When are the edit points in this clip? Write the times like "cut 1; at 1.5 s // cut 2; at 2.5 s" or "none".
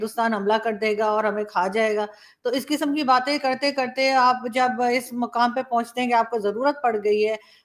none